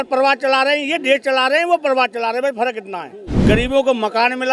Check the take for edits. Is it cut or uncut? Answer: cut